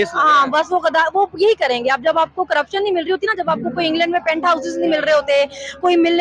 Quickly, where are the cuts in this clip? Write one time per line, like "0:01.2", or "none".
none